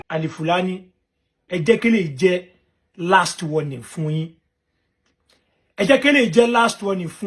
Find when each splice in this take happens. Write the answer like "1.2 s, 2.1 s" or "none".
1.4 s